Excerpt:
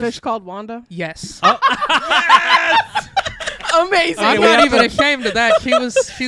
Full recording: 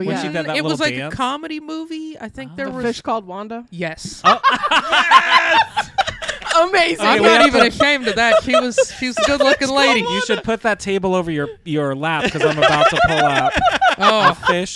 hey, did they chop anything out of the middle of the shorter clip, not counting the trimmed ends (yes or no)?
no